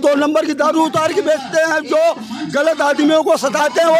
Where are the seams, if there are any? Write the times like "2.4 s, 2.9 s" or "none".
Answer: none